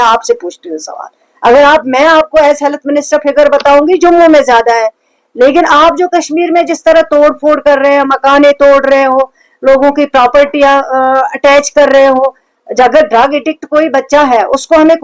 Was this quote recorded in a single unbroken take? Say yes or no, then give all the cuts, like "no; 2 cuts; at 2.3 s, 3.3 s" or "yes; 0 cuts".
yes; 0 cuts